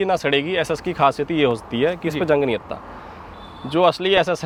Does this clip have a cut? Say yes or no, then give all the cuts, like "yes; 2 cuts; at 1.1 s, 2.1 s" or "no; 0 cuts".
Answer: no; 0 cuts